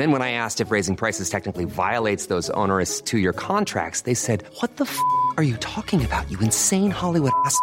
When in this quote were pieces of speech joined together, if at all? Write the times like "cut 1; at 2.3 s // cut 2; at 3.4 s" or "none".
none